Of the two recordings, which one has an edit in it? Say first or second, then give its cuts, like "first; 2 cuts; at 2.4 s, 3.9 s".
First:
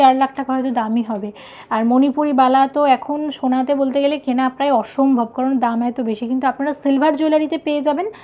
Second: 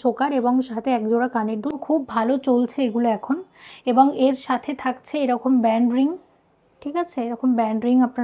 second; 1 cut; at 1.7 s